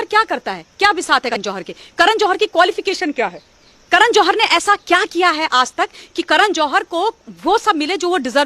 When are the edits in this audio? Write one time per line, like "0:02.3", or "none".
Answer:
0:01.4